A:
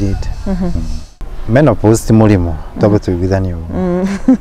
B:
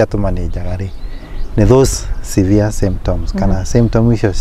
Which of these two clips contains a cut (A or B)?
A